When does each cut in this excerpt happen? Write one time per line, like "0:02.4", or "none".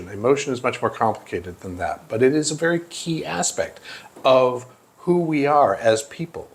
none